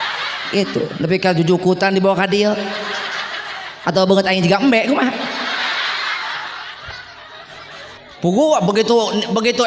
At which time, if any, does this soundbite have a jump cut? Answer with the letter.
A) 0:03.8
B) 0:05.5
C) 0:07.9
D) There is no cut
C